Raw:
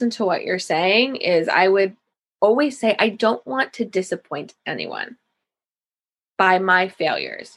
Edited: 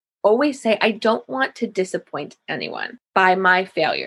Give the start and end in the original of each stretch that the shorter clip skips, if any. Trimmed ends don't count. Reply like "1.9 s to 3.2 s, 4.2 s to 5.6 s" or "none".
5.1 s to 6.2 s